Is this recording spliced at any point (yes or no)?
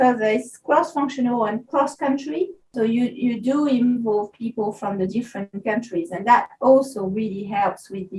yes